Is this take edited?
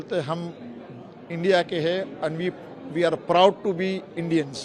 no; 0 cuts

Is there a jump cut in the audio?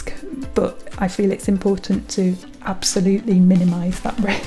no; 0 cuts

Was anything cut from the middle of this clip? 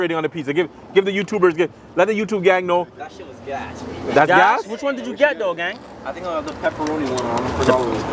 no; 0 cuts

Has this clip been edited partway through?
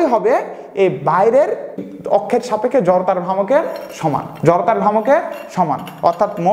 no; 0 cuts

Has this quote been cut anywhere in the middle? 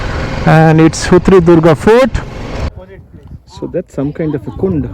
yes; 1 cut; at 2.7 s

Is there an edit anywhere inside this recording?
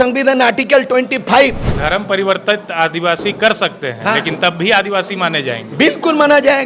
yes; 1 cut; at 1.7 s

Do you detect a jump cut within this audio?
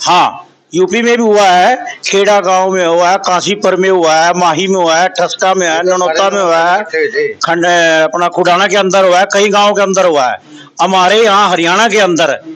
no; 0 cuts

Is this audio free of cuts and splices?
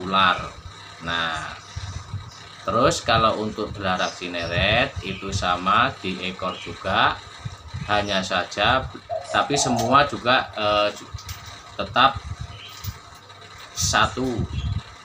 no; 1 cut; at 9.0 s

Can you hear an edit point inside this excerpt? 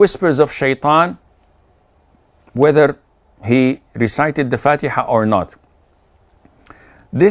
no; 0 cuts

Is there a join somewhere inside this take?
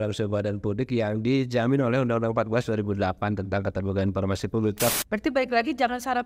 yes; 1 cut; at 4.9 s

